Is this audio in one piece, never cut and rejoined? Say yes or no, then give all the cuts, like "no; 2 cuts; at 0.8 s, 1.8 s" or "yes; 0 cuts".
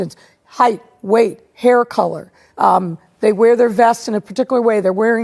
yes; 0 cuts